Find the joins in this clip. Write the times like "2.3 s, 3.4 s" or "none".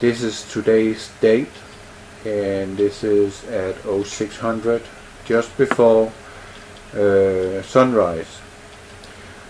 2.5 s